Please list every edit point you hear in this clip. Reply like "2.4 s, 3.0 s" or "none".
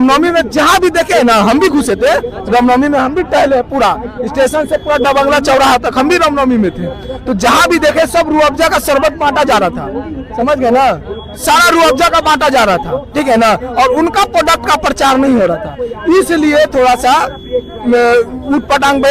none